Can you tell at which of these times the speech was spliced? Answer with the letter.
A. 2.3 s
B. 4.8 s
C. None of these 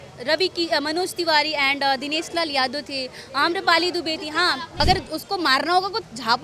B